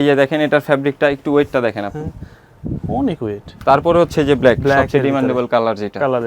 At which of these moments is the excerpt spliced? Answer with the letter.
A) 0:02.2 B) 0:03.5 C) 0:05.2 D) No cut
B